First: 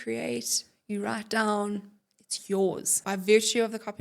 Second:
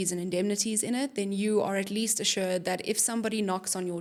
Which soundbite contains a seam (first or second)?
first